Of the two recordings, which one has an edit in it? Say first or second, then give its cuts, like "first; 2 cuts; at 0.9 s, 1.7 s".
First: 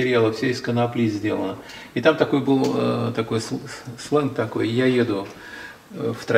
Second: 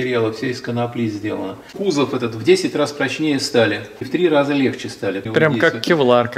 second; 2 cuts; at 1.6 s, 5.3 s